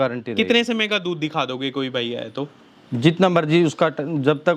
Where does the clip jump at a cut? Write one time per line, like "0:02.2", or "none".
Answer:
none